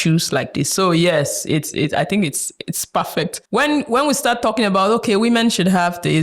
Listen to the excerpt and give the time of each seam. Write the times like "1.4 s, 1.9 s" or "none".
3.4 s